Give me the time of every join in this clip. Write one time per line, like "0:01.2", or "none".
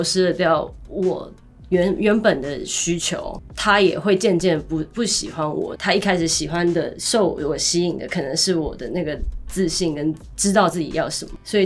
0:03.4
0:05.7